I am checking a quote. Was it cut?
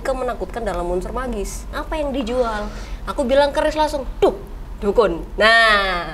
yes; 1 cut; at 1.7 s

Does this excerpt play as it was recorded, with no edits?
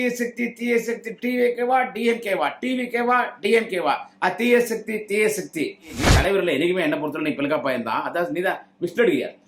no; 1 cut; at 6.0 s

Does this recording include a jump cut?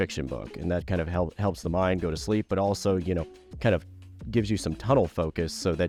no; 0 cuts

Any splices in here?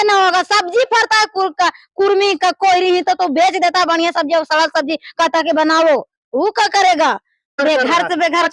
yes; 1 cut; at 7.6 s

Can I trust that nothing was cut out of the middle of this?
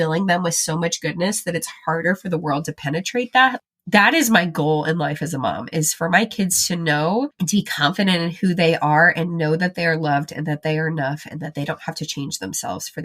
no; 1 cut; at 7.3 s

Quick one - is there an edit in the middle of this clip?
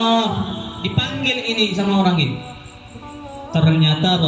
no; 0 cuts

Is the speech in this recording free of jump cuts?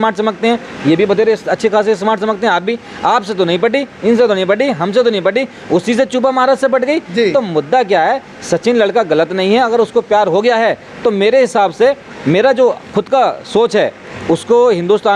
yes; 0 cuts

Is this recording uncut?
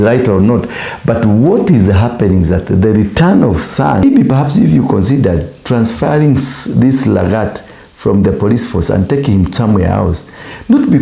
no; 1 cut; at 4.0 s

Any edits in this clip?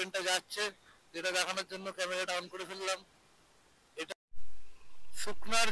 yes; 1 cut; at 4.1 s

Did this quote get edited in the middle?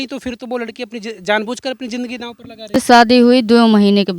yes; 1 cut; at 2.7 s

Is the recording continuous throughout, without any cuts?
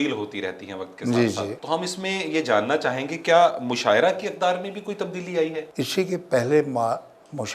no; 2 cuts; at 1.6 s, 5.7 s

